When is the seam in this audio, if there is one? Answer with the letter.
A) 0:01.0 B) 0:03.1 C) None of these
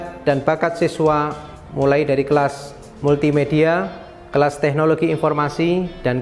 C